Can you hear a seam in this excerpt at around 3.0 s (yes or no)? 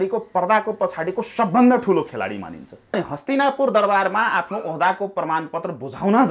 yes